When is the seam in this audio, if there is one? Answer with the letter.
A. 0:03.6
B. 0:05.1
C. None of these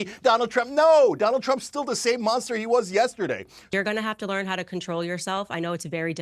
A